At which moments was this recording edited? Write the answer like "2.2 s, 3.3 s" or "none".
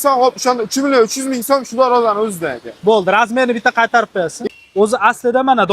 4.4 s